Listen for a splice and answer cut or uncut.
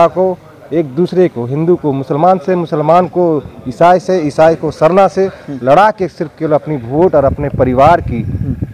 uncut